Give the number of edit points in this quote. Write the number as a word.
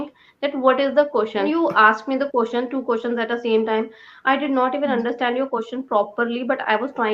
one